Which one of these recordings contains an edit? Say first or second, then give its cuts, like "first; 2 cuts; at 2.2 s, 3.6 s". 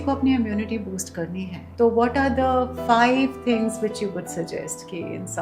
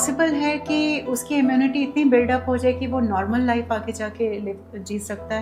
first; 1 cut; at 1.6 s